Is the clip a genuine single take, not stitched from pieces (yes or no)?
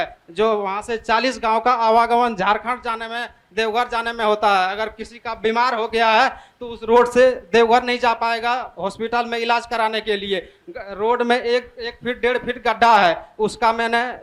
yes